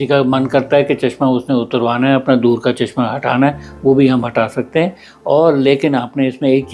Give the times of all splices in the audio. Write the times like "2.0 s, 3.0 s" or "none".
none